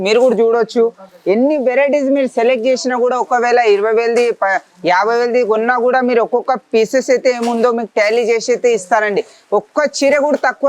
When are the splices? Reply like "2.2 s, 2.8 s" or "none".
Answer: none